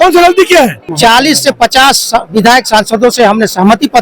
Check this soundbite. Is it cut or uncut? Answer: cut